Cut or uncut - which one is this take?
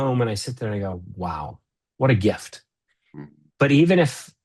uncut